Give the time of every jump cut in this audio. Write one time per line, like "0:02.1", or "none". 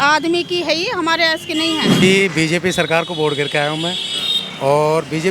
0:02.0